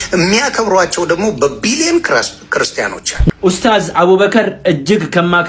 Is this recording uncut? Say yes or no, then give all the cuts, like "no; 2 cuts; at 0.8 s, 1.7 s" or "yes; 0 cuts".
no; 1 cut; at 3.1 s